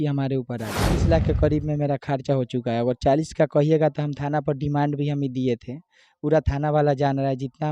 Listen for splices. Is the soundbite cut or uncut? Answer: cut